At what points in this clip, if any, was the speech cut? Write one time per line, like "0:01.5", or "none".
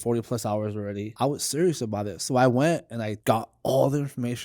0:01.1
0:03.1